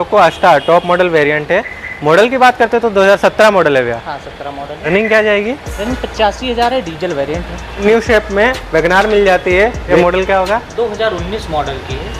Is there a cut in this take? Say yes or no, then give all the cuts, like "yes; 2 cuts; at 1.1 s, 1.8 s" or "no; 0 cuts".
yes; 3 cuts; at 4.8 s, 7.8 s, 9.9 s